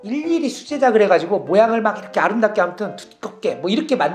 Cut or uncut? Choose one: uncut